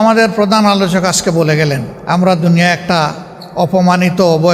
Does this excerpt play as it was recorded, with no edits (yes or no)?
no